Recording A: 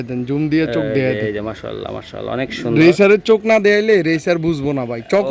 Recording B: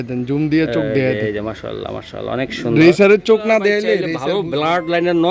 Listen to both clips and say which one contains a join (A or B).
B